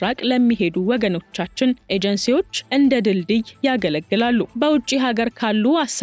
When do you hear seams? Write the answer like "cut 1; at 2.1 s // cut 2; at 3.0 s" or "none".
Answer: none